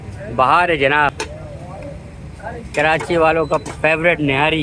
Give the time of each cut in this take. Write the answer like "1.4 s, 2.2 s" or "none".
1.1 s